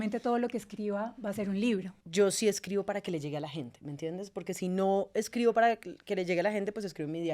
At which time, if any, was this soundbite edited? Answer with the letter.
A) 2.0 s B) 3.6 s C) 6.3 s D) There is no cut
A